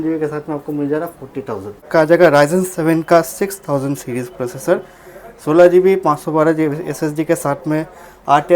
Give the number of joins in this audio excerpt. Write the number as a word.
one